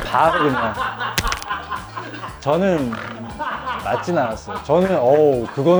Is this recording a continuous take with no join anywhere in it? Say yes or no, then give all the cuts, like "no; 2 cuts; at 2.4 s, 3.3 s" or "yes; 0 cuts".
yes; 0 cuts